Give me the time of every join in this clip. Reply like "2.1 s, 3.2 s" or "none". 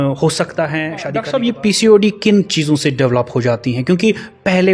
1.0 s